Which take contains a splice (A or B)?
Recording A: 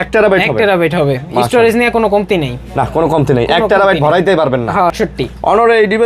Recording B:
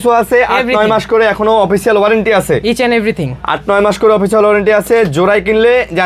A